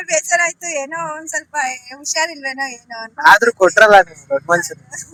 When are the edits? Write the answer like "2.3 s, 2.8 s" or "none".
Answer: none

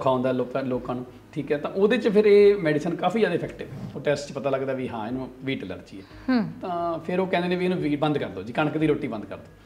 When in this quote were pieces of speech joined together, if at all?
3.9 s

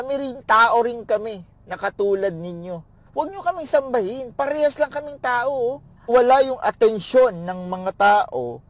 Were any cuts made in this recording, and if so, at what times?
3.0 s, 5.9 s

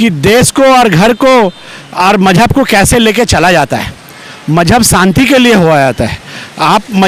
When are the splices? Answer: none

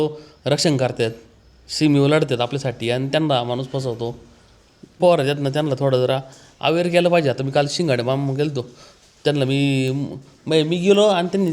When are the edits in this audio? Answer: 5.0 s

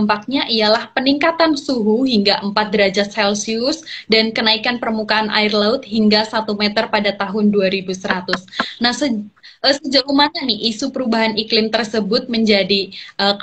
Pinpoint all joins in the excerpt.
none

